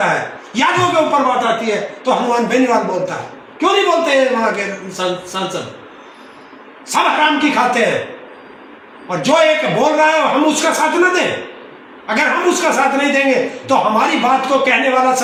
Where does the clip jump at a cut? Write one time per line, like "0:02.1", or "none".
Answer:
none

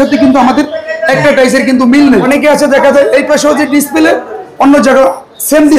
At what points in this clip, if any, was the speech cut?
0:02.3

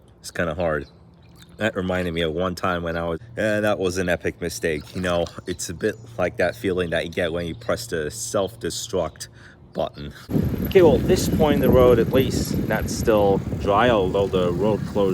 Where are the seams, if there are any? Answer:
0:03.3
0:10.3

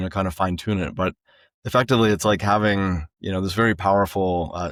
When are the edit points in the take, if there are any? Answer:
none

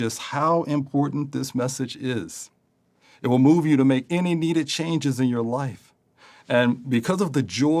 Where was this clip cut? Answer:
0:06.1

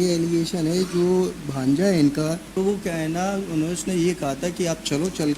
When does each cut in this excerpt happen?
0:02.6

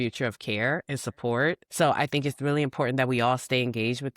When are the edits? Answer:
0:01.6

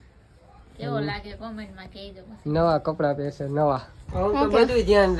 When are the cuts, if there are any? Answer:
0:04.0

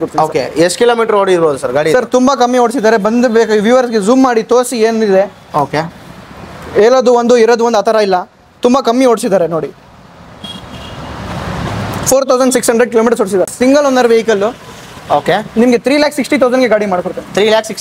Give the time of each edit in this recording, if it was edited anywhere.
0:13.5

